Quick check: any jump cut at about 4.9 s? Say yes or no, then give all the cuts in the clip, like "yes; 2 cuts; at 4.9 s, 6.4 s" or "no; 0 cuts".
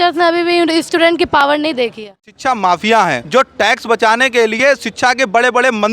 no; 2 cuts; at 2.3 s, 3.2 s